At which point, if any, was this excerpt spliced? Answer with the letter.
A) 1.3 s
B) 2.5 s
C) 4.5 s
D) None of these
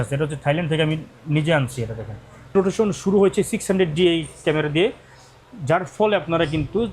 B